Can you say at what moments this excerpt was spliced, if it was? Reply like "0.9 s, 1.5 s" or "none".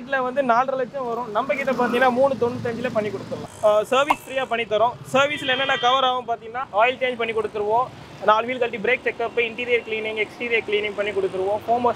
3.3 s, 6.6 s